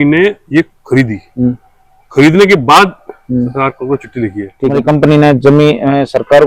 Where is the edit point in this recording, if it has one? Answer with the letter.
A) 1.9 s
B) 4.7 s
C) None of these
B